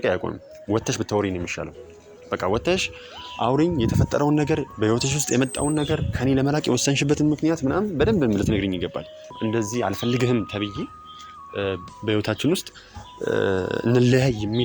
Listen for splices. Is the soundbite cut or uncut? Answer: cut